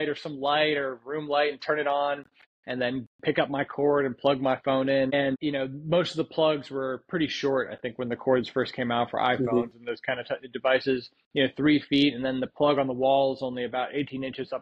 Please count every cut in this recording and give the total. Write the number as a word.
one